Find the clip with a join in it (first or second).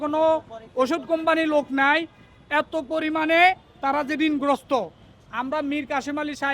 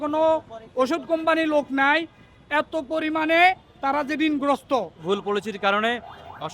second